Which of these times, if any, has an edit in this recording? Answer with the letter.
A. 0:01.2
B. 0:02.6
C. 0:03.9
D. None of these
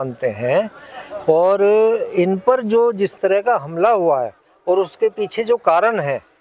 D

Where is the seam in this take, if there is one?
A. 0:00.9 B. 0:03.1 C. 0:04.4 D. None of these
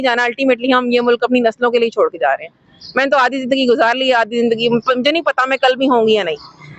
D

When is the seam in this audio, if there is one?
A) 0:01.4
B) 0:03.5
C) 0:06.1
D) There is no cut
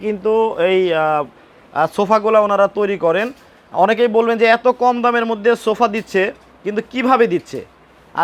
D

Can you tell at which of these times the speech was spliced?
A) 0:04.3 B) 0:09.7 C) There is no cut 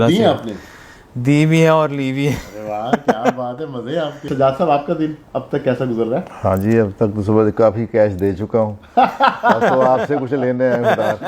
A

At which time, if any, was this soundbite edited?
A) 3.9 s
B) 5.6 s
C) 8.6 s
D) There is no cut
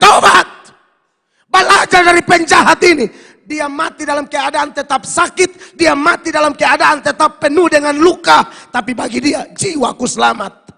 D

